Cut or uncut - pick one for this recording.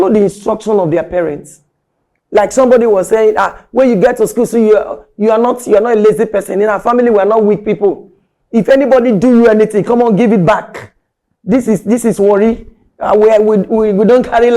uncut